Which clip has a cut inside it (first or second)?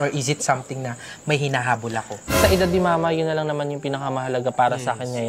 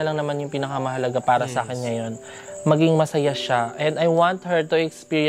first